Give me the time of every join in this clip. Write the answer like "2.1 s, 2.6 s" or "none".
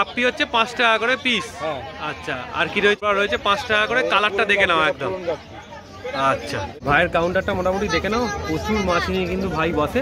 3.1 s, 6.8 s